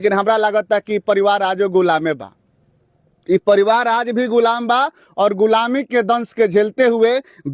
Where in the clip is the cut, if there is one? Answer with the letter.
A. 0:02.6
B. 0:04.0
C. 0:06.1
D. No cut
D